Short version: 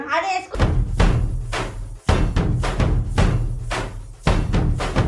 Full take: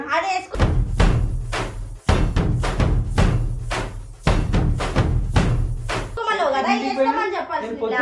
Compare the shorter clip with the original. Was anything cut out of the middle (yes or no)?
no